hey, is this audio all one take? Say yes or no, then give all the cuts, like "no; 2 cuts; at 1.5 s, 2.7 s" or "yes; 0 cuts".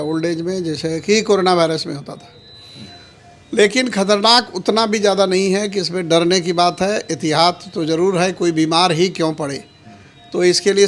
yes; 0 cuts